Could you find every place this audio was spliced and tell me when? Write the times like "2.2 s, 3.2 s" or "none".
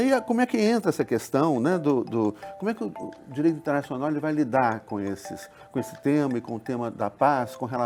none